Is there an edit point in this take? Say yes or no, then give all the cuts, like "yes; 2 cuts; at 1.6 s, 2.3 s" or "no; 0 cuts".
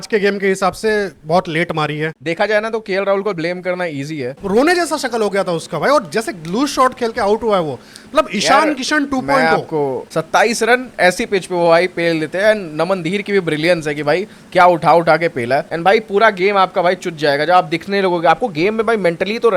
yes; 4 cuts; at 2.2 s, 4.4 s, 10.1 s, 15.7 s